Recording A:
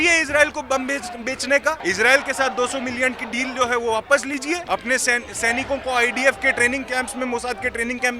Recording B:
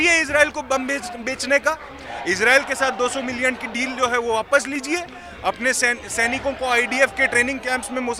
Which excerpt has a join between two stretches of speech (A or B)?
A